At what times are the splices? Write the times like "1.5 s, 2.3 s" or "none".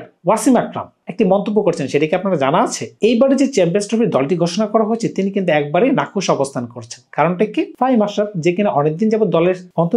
none